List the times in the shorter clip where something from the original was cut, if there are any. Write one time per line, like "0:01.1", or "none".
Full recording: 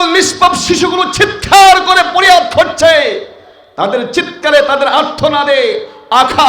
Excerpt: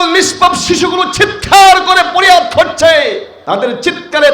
0:03.3